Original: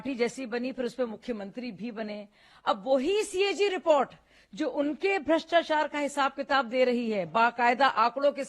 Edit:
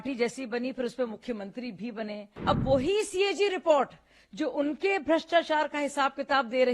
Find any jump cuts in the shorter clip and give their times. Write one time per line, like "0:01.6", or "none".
0:02.3